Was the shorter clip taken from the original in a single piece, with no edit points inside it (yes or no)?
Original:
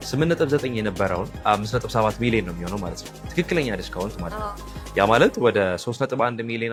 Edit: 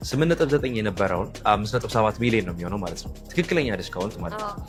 yes